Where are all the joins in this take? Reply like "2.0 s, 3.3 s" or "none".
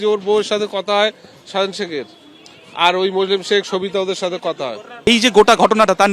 5.1 s